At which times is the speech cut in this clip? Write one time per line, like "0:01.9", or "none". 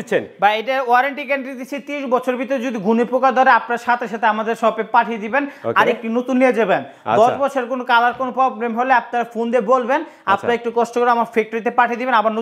none